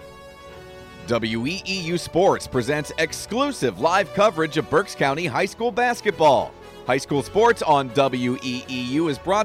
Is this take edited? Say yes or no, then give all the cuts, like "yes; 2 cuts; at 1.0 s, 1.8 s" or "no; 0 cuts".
yes; 1 cut; at 1.0 s